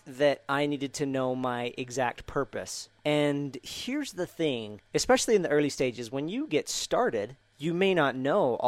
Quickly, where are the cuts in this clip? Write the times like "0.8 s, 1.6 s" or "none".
2.8 s, 4.8 s, 7.4 s